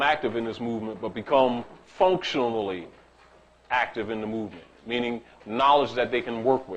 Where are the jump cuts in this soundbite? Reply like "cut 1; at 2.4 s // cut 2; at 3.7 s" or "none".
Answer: cut 1; at 1.2 s